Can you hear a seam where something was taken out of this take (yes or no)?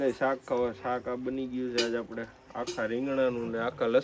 no